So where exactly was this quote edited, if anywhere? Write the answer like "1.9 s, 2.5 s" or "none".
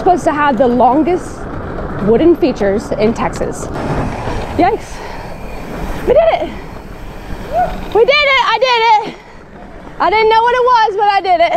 3.8 s